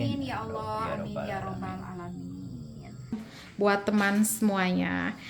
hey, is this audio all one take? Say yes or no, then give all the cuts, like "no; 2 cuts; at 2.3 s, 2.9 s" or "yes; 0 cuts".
no; 1 cut; at 3.4 s